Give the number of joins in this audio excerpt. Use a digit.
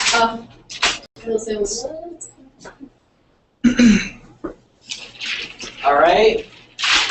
0